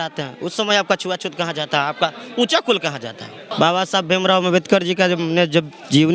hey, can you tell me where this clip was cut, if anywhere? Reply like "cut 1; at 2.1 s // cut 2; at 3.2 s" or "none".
cut 1; at 3.5 s